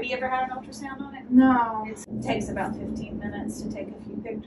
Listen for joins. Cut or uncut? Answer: cut